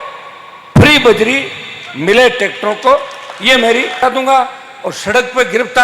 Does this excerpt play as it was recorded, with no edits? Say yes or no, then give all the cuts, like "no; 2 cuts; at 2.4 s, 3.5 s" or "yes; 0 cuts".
no; 1 cut; at 4.0 s